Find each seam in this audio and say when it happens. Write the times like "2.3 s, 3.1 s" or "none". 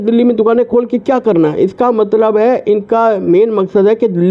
none

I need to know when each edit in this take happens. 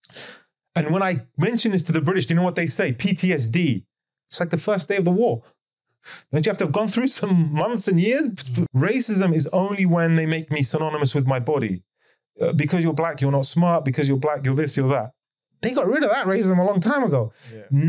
8.7 s

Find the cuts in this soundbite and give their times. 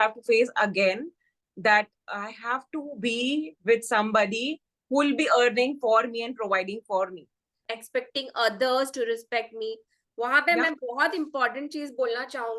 7.7 s

